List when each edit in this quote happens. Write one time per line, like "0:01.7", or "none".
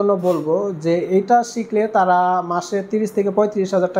none